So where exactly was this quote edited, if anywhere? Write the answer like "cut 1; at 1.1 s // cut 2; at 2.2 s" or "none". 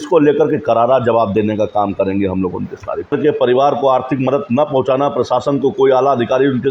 cut 1; at 3.1 s